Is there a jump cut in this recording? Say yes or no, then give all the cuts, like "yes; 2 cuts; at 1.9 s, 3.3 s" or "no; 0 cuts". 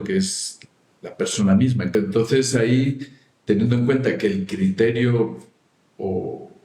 yes; 1 cut; at 1.9 s